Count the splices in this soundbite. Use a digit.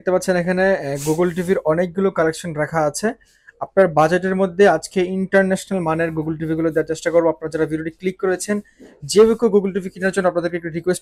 0